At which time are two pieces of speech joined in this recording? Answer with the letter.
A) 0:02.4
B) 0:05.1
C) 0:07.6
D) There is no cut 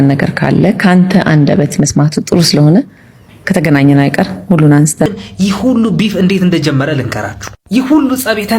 B